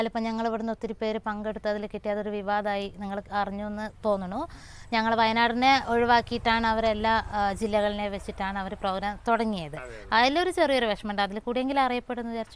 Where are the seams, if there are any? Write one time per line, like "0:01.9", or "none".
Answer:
none